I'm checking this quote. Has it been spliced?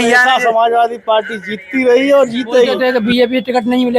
yes; 1 cut; at 2.8 s

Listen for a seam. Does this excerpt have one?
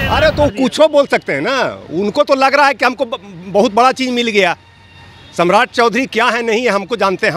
no; 0 cuts

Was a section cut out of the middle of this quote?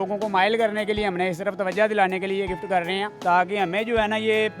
yes; 1 cut; at 3.1 s

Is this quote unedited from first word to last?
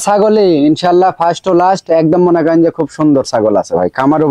yes; 0 cuts

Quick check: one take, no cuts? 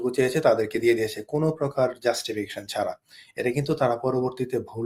yes; 0 cuts

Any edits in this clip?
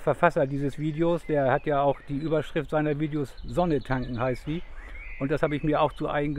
no; 0 cuts

